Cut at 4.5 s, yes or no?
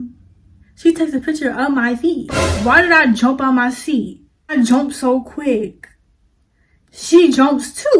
yes